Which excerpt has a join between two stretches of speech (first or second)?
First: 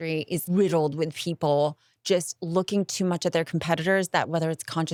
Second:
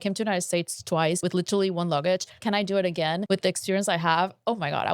second